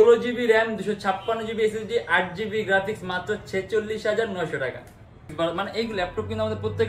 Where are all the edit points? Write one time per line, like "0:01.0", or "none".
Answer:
0:05.3